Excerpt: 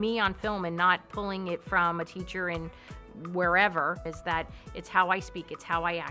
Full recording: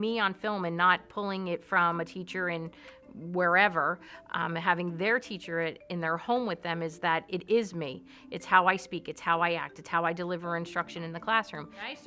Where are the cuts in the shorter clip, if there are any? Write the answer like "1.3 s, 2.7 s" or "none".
4.2 s